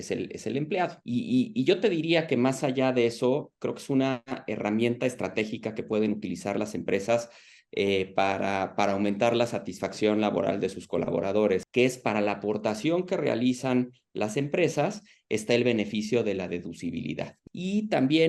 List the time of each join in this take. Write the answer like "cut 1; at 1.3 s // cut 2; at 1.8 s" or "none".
cut 1; at 1.0 s // cut 2; at 11.7 s // cut 3; at 17.4 s